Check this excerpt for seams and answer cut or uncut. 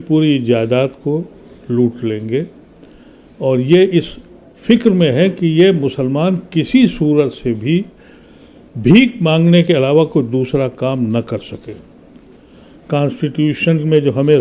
uncut